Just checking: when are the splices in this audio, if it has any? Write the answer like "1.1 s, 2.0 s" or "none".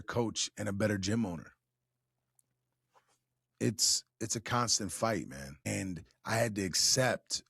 5.6 s